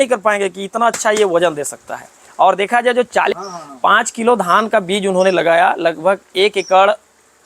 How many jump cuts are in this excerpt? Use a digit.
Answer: 1